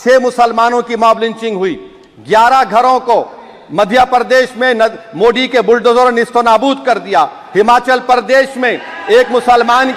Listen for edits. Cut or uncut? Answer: uncut